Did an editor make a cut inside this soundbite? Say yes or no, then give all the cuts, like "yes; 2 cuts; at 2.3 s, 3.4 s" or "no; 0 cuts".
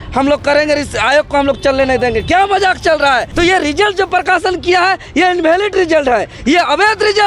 yes; 1 cut; at 3.3 s